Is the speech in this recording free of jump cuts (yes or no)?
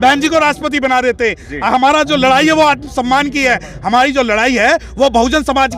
yes